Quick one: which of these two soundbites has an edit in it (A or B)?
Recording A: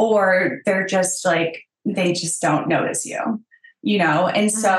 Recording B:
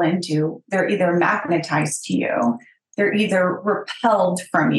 A